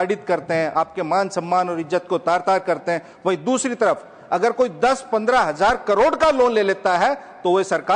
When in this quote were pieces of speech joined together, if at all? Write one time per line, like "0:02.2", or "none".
none